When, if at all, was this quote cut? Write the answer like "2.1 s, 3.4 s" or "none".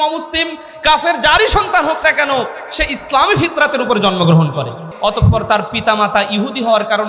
4.9 s

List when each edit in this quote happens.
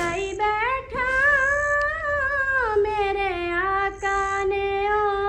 none

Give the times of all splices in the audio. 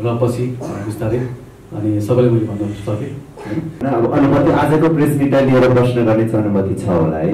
3.8 s

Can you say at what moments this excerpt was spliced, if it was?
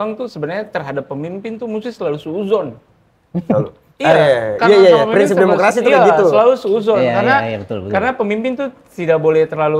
none

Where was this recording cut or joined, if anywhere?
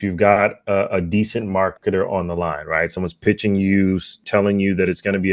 4.1 s

